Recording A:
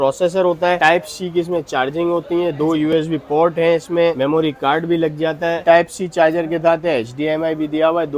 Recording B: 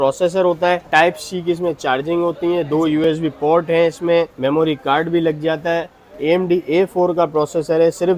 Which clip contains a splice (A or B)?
A